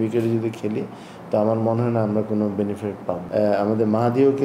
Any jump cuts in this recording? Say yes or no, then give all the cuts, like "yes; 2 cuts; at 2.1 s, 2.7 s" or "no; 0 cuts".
yes; 1 cut; at 3.2 s